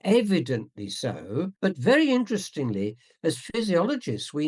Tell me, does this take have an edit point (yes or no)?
yes